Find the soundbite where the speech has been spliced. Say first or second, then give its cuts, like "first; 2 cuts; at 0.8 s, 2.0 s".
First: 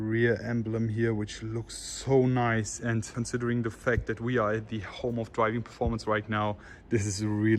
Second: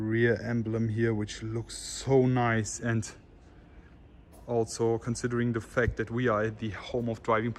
first; 1 cut; at 3.1 s